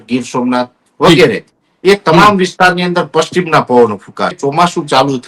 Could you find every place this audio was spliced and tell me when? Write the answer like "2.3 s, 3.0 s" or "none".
4.4 s